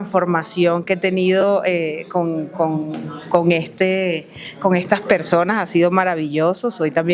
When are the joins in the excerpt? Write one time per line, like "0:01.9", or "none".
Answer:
none